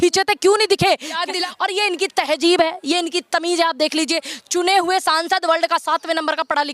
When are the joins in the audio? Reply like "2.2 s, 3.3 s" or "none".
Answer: 1.3 s